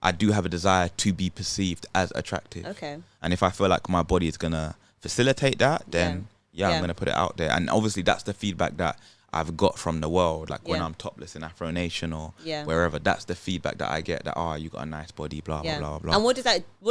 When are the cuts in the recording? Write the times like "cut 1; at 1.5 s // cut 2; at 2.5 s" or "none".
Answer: none